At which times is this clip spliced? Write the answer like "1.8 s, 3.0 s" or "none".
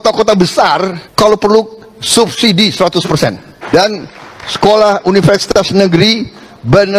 1.0 s, 3.6 s